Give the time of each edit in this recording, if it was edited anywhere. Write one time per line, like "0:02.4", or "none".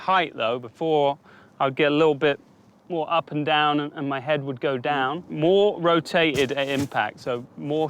0:05.3